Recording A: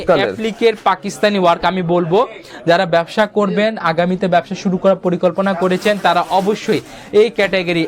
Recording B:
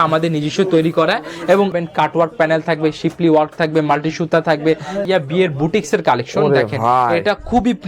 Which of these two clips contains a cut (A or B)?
B